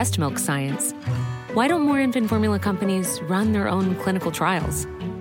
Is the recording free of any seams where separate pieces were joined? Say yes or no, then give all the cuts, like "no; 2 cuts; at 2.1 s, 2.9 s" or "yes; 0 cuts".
yes; 0 cuts